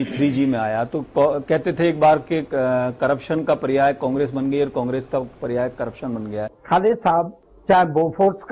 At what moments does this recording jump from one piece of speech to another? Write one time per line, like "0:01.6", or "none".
0:06.6
0:07.5

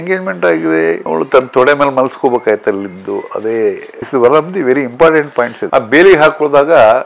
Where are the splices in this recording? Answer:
0:01.0
0:05.6

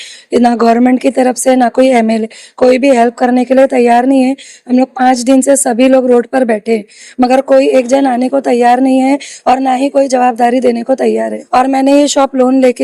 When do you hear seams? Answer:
0:11.4

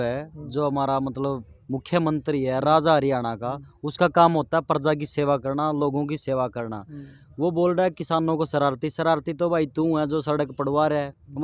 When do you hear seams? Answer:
none

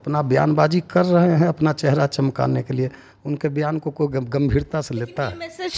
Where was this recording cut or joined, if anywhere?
none

